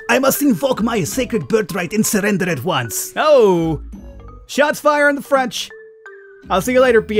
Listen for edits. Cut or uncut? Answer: uncut